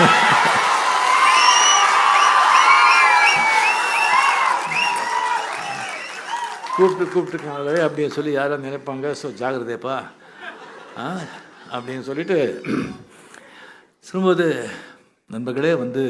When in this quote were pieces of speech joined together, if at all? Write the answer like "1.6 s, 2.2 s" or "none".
none